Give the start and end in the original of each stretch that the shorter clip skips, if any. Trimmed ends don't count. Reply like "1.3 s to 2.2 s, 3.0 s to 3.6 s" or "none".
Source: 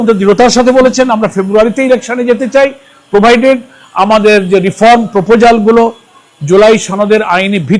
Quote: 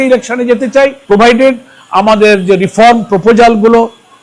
2.8 s to 3.0 s